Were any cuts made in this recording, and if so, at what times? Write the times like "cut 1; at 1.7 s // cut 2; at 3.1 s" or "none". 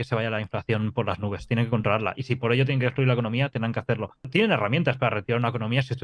cut 1; at 4.3 s